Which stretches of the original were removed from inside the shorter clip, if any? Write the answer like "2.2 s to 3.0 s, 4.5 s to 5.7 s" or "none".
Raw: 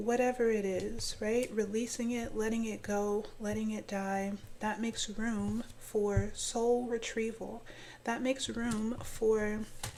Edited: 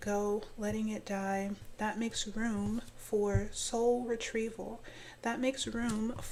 none